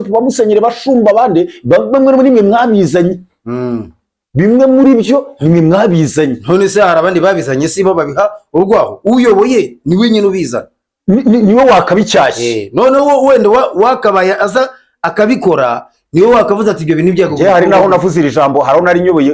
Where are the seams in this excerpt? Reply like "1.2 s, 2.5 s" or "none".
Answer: none